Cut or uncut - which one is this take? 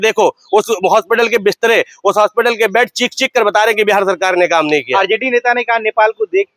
uncut